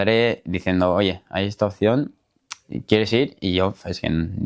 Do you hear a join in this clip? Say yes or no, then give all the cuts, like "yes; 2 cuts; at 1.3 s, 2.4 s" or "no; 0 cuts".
no; 0 cuts